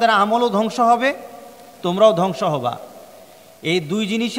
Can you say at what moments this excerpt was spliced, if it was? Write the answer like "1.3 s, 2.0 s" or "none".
none